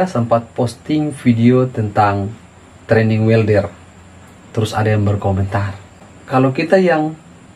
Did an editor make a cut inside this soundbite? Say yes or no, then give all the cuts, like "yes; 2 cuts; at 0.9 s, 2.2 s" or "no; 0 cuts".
no; 0 cuts